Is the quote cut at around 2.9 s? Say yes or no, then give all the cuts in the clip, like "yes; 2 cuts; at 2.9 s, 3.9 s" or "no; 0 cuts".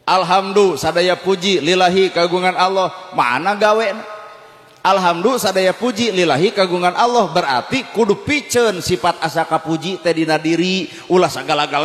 no; 0 cuts